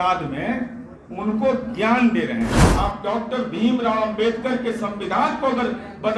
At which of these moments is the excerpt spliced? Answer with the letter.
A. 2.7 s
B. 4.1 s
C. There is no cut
A